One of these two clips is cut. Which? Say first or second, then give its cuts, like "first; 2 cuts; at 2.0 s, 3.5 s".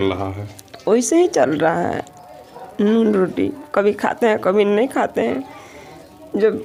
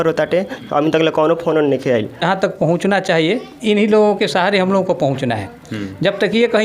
second; 1 cut; at 2.2 s